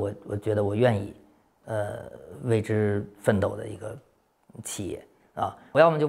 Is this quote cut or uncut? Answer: uncut